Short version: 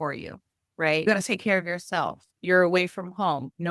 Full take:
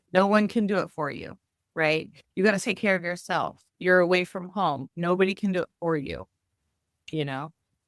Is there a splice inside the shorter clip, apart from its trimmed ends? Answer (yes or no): yes